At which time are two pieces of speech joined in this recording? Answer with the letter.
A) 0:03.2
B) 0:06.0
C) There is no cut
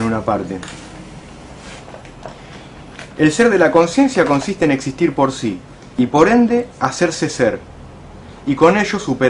C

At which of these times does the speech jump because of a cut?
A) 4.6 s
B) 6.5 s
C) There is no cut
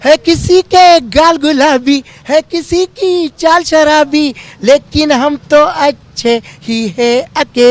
C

